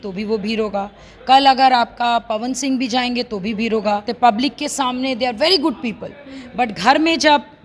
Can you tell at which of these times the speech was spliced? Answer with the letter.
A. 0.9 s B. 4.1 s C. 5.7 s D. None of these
B